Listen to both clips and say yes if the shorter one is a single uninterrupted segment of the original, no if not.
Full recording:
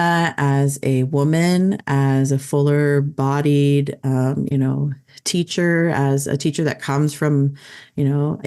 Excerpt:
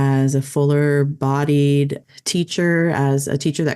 no